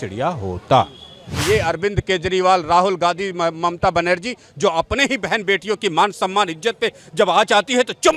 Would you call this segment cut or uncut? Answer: cut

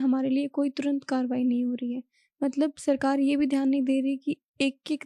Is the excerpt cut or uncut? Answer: uncut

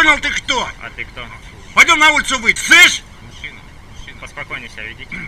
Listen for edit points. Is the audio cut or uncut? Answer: cut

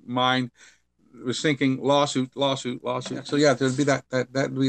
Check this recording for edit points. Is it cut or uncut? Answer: cut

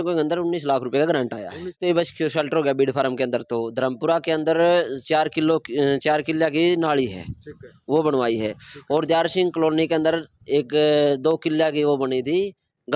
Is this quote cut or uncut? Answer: cut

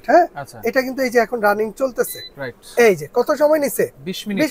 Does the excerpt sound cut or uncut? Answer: uncut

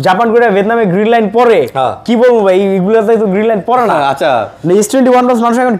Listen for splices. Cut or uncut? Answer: uncut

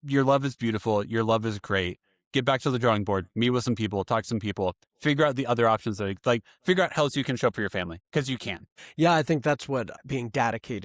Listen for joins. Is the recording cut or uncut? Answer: cut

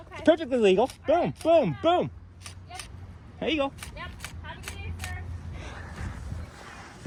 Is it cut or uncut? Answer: uncut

